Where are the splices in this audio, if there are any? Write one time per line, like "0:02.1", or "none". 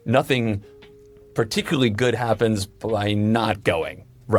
none